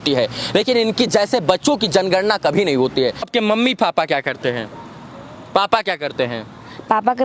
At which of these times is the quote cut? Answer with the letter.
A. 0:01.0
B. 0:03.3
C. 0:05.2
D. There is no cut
B